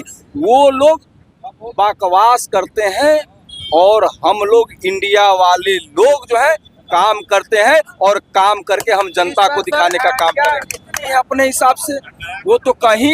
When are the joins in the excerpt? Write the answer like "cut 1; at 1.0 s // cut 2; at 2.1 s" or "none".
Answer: cut 1; at 11.1 s